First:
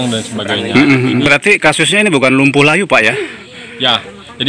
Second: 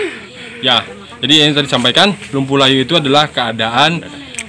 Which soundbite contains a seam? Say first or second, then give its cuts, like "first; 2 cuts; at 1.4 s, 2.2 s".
first; 1 cut; at 1.2 s